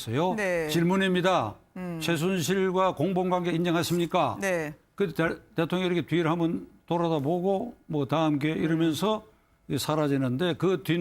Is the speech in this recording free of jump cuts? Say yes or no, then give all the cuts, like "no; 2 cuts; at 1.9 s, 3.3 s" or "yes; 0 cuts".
no; 1 cut; at 6.6 s